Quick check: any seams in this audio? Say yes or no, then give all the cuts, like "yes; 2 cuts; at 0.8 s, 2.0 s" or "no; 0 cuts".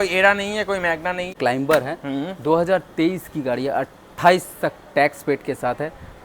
yes; 1 cut; at 1.3 s